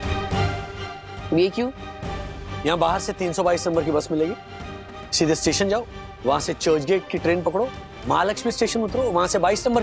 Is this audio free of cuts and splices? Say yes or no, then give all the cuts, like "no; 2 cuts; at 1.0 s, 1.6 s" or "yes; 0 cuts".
yes; 0 cuts